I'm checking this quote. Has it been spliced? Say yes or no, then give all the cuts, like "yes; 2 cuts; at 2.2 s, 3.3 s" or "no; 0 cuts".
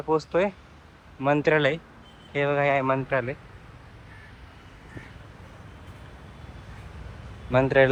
no; 0 cuts